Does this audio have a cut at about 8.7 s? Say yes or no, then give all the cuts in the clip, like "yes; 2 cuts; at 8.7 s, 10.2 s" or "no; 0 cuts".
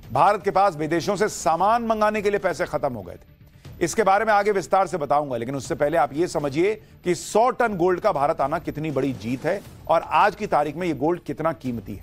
no; 1 cut; at 1.2 s